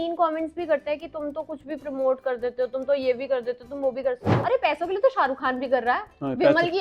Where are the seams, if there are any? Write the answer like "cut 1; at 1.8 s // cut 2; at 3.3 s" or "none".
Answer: cut 1; at 4.3 s